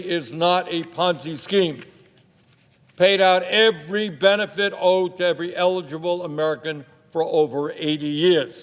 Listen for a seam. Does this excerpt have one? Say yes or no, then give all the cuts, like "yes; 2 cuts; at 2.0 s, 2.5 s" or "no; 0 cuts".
no; 0 cuts